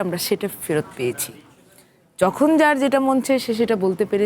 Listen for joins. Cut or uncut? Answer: uncut